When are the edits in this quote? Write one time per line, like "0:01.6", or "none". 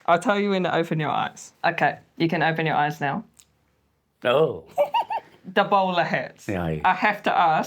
none